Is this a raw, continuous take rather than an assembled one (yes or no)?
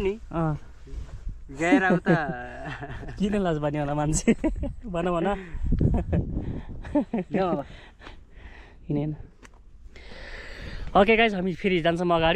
yes